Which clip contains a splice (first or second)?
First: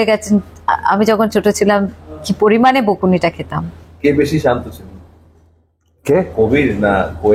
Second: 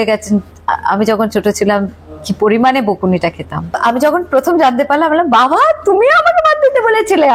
second